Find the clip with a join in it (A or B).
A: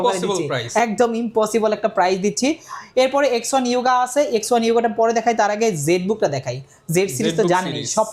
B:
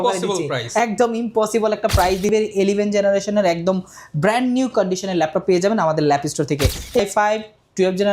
B